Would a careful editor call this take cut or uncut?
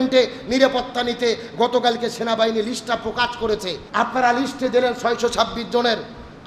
cut